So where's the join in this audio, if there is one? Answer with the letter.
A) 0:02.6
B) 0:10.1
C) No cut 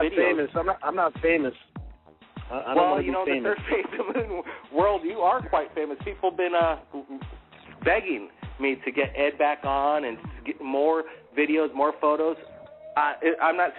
A